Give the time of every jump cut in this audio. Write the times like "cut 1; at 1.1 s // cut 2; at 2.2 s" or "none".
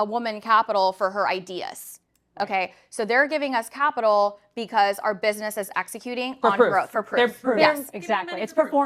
none